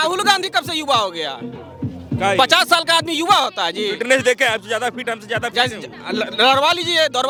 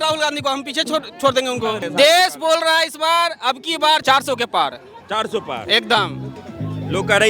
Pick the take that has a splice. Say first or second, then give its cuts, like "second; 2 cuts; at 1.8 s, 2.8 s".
second; 2 cuts; at 1.8 s, 4.0 s